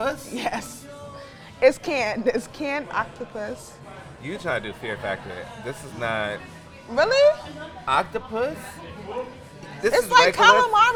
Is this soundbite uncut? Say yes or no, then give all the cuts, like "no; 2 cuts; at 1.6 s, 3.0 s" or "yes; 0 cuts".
yes; 0 cuts